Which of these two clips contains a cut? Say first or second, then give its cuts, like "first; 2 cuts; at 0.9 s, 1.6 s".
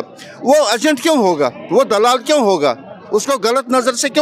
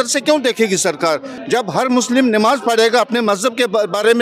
second; 1 cut; at 1.3 s